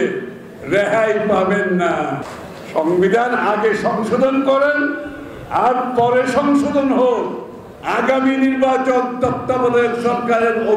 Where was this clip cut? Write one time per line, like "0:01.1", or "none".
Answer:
0:02.3